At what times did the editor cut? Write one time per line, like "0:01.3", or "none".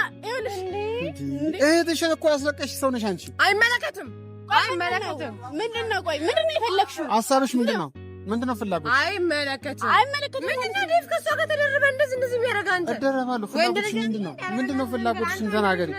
none

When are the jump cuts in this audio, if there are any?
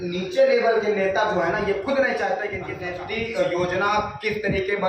0:02.7

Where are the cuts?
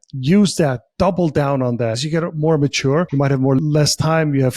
0:02.0
0:03.6

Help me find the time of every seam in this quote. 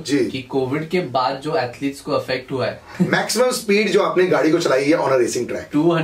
0:02.8

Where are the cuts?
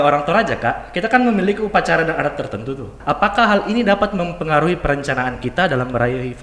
0:02.9

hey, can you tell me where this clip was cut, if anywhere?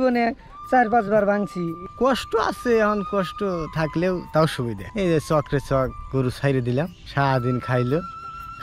0:01.8
0:04.8
0:07.0

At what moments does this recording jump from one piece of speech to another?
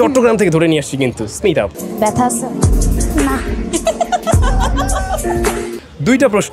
none

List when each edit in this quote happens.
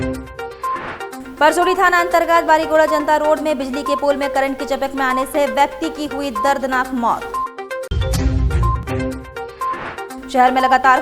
0:01.2

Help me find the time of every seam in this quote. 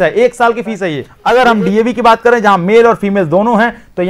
0:01.1

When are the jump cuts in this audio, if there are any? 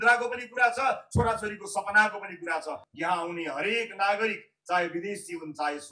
0:02.9

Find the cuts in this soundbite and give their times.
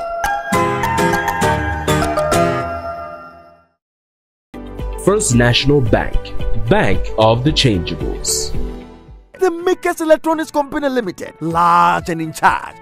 0:09.3

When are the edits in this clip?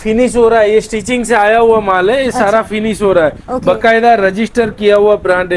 none

